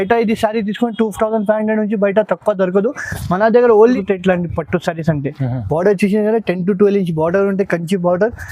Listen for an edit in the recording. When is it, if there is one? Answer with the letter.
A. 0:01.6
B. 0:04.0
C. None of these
B